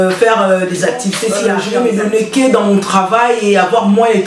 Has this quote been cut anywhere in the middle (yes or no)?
yes